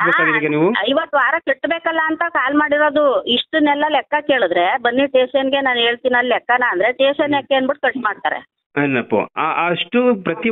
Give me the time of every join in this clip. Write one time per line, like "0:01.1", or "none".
0:08.6